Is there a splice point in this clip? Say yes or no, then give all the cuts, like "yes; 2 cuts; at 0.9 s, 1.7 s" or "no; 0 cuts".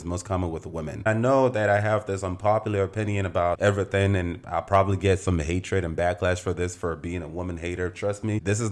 yes; 1 cut; at 1.0 s